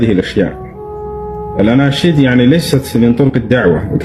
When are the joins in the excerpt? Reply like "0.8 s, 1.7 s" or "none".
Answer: none